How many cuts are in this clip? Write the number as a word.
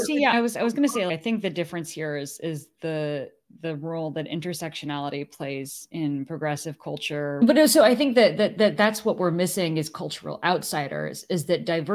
one